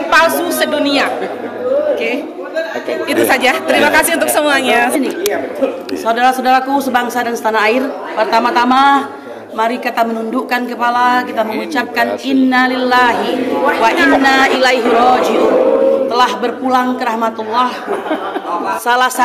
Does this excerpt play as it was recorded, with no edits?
yes; 0 cuts

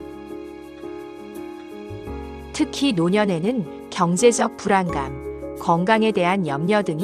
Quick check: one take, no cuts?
yes; 0 cuts

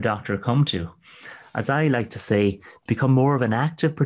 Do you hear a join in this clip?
no; 0 cuts

